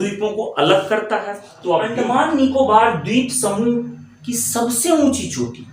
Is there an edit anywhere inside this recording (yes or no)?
yes